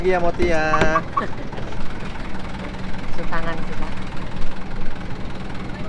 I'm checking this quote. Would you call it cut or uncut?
cut